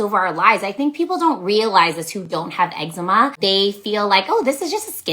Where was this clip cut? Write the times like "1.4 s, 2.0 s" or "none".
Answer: 3.4 s